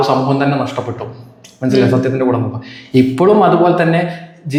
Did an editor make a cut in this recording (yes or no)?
no